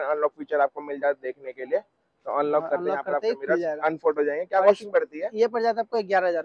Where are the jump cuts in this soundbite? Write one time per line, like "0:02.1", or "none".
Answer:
none